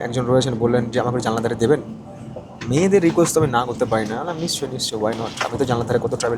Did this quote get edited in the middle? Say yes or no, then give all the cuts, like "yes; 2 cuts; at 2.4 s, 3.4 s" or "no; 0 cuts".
no; 0 cuts